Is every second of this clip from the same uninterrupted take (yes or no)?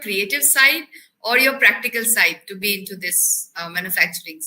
yes